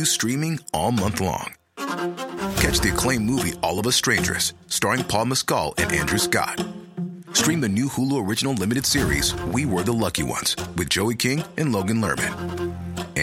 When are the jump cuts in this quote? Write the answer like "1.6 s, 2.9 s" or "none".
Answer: none